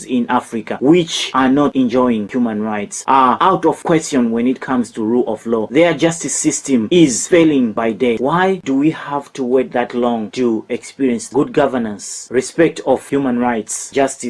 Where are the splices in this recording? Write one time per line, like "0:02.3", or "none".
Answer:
0:02.3
0:08.6
0:11.3

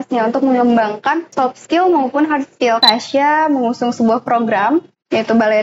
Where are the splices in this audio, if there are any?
0:01.3
0:02.8

